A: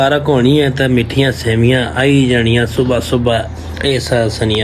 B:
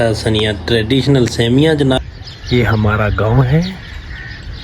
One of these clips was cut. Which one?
B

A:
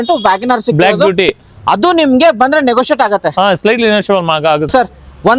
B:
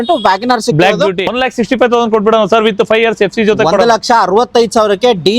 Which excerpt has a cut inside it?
B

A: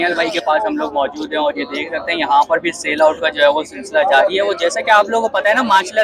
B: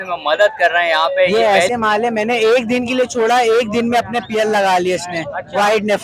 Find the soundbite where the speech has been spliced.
B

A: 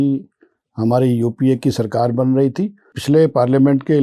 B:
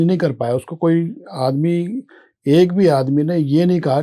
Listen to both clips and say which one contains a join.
A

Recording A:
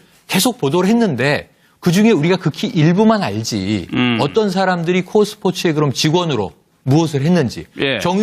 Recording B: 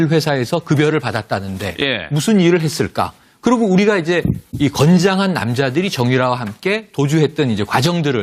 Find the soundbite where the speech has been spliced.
B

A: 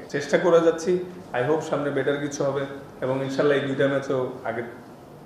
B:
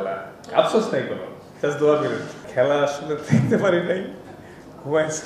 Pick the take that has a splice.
B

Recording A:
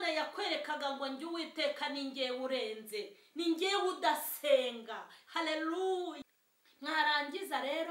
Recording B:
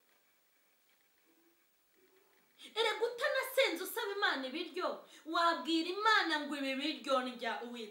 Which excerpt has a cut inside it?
A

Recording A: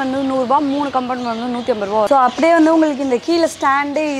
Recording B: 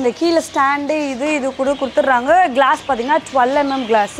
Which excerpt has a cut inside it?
A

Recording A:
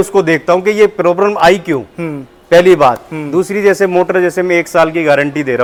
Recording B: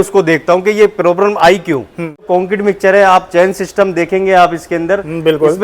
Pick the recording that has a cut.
B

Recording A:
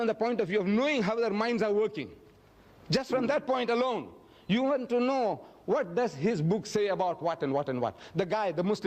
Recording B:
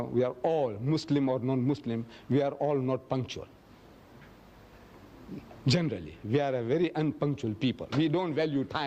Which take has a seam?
A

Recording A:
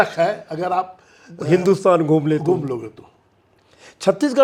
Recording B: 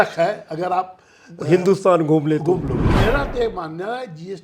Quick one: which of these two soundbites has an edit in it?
B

